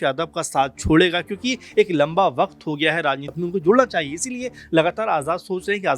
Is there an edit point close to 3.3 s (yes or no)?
yes